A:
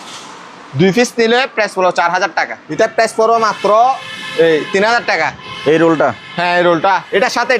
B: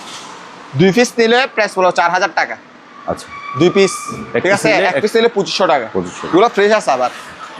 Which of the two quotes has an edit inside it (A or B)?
A